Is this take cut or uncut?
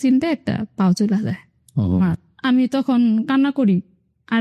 cut